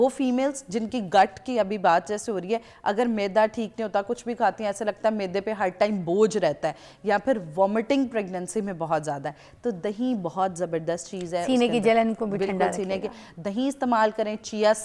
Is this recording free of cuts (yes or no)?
yes